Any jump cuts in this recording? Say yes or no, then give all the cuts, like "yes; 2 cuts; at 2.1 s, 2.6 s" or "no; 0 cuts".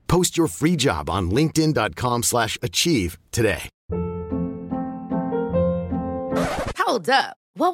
yes; 1 cut; at 3.7 s